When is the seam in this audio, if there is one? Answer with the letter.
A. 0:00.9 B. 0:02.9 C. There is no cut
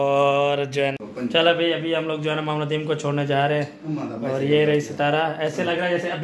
A